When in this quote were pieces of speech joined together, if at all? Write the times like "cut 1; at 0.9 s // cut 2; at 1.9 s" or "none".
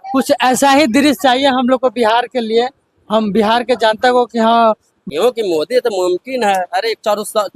cut 1; at 4.9 s